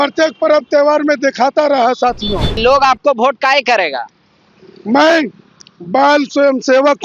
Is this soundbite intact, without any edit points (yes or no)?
no